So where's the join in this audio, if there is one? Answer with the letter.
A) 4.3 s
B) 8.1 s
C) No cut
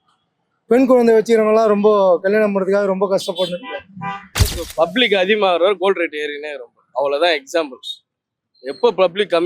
A